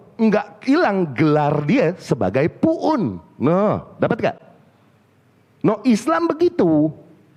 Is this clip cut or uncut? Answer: uncut